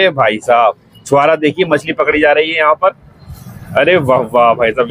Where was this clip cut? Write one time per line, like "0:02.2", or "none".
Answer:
none